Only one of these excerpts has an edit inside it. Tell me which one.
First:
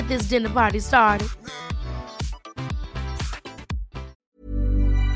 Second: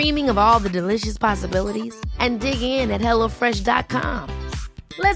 first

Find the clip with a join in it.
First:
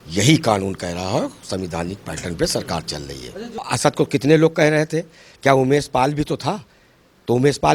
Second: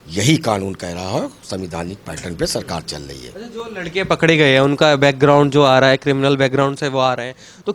first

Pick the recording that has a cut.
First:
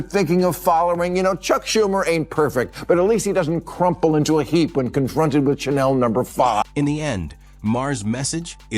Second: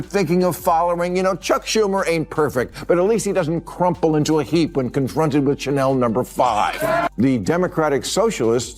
second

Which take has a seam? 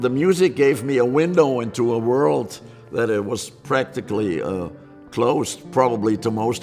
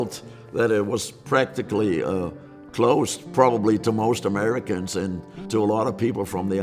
second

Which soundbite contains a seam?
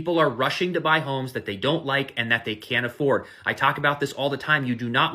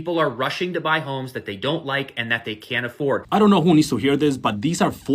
second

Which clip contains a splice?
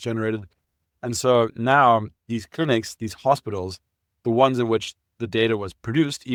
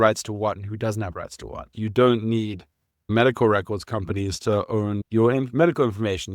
second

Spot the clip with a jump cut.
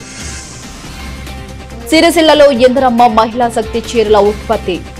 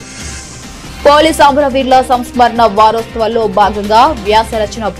second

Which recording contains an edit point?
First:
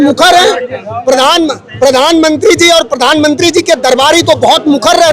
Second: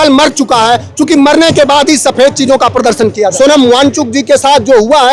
second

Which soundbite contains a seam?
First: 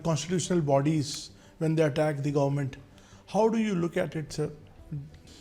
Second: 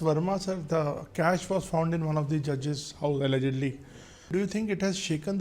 second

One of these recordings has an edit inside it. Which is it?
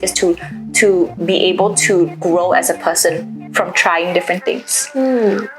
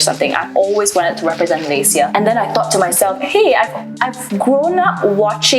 second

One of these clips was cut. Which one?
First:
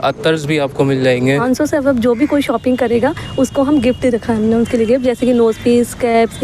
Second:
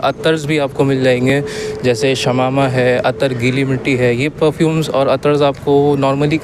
first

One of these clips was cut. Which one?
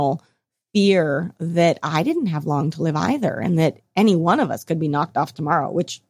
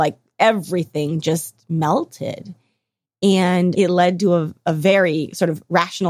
second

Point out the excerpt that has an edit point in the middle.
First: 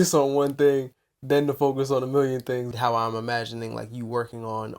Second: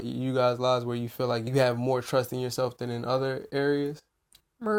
first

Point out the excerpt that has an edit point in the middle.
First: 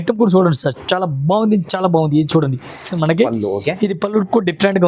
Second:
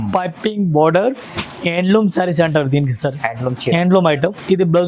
first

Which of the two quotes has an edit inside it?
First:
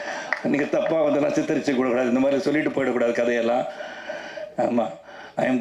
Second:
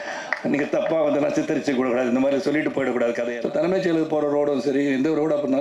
second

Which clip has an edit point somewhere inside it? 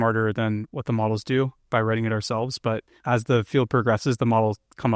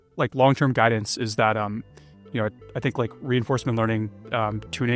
first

